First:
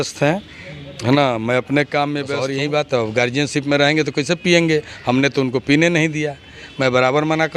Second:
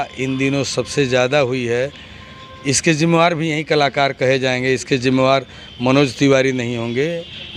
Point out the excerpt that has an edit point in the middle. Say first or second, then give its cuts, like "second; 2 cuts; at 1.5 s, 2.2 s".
first; 1 cut; at 2.3 s